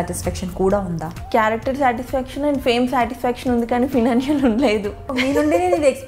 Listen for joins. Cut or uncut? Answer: cut